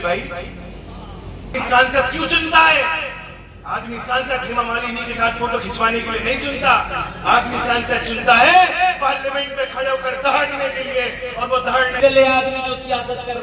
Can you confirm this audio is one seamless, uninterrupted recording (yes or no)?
no